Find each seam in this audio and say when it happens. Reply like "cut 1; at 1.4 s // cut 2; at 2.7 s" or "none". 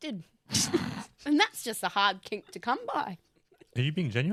none

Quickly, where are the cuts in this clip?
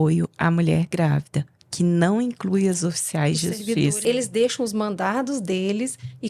cut 1; at 4.0 s

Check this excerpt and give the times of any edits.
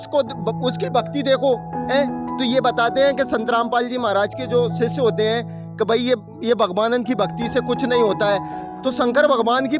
none

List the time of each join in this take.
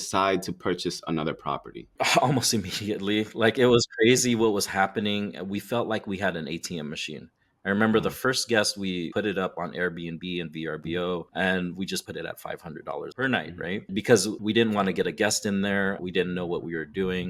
none

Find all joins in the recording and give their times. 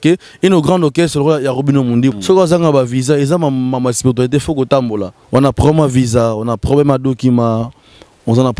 cut 1; at 2.1 s // cut 2; at 5.1 s

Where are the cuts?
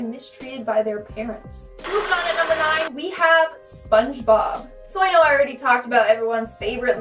cut 1; at 1.7 s

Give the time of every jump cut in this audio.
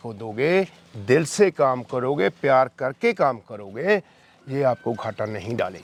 none

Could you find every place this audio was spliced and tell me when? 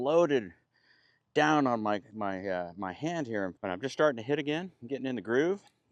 cut 1; at 3.6 s

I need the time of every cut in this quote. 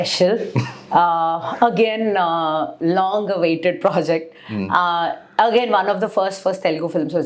none

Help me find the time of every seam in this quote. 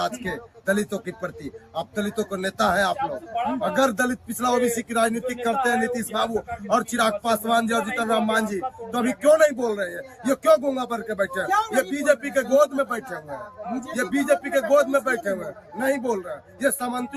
none

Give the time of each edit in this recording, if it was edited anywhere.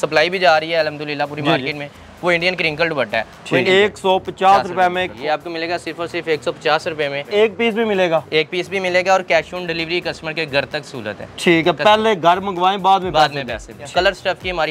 cut 1; at 3.6 s // cut 2; at 5.2 s // cut 3; at 7.3 s // cut 4; at 13.8 s

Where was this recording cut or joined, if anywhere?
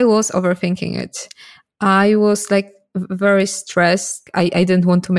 cut 1; at 4.3 s

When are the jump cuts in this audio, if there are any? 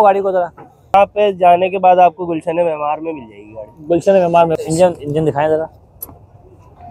cut 1; at 0.9 s // cut 2; at 4.5 s

